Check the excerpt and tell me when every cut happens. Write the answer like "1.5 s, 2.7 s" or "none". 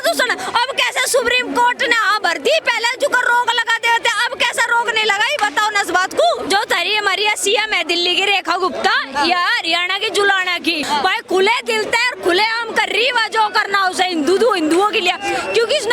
6.4 s, 10.8 s